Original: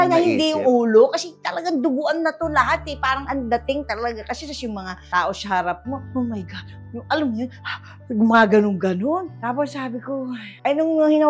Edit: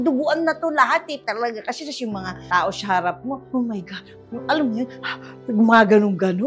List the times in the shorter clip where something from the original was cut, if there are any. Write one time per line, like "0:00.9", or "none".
0:01.2